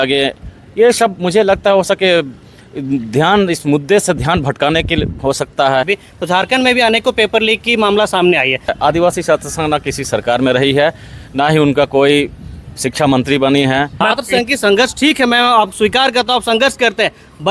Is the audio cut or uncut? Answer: cut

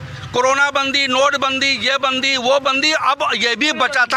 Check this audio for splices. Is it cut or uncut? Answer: uncut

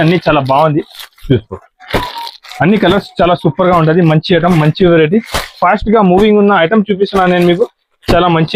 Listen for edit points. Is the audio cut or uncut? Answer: uncut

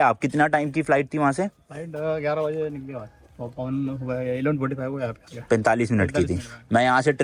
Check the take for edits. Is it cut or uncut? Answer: uncut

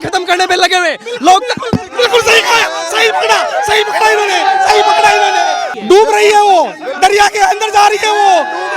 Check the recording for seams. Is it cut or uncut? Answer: cut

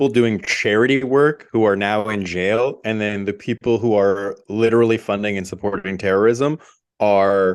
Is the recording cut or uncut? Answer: uncut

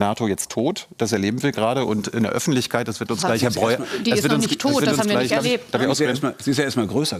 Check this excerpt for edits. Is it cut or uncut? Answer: uncut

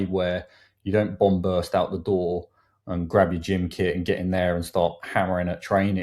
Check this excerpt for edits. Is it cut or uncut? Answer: uncut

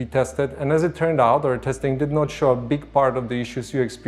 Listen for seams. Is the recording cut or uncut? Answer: uncut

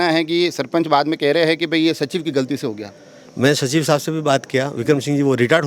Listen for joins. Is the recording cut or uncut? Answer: uncut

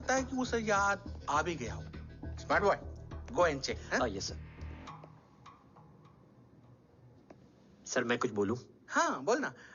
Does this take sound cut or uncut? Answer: uncut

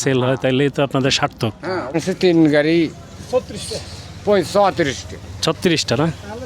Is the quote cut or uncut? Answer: cut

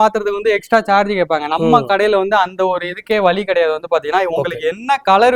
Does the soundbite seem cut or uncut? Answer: uncut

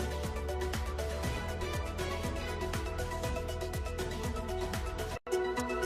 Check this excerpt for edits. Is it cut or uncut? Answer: uncut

